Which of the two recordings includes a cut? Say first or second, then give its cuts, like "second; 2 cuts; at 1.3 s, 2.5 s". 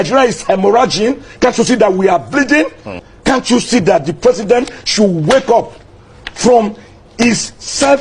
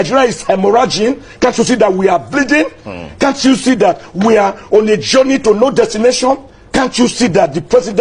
first; 1 cut; at 3.0 s